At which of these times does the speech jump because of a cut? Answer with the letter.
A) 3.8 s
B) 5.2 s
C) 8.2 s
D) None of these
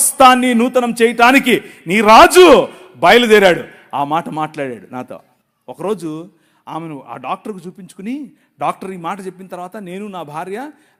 D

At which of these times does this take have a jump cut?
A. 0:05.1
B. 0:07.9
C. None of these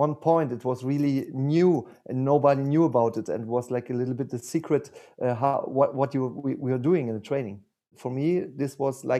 B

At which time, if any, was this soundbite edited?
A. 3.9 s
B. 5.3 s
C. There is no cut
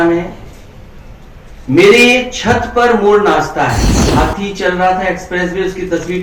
A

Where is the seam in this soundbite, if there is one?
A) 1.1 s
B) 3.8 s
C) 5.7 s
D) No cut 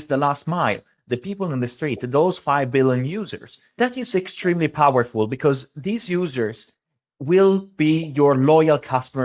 B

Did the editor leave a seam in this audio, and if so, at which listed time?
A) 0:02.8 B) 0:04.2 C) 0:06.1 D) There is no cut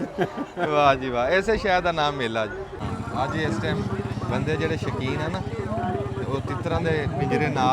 A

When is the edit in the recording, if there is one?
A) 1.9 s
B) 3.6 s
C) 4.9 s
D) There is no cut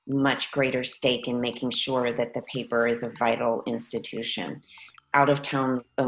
C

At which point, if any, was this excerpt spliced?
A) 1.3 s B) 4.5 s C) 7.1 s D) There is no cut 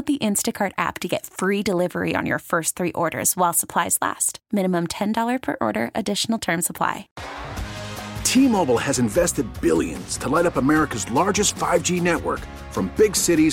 C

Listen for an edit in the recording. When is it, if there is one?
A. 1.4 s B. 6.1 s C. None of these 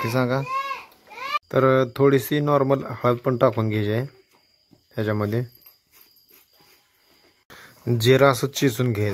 A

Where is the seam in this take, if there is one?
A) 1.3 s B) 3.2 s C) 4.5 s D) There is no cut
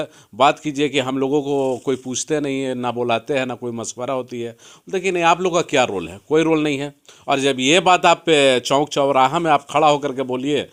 D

